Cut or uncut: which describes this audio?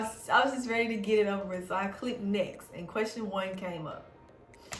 uncut